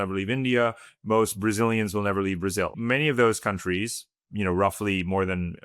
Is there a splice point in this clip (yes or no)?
yes